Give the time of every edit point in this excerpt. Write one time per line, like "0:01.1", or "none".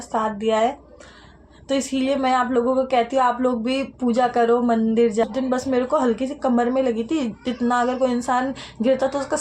0:05.3